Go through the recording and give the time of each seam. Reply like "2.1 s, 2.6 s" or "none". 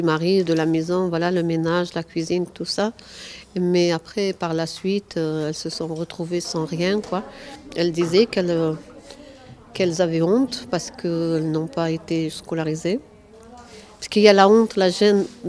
10.6 s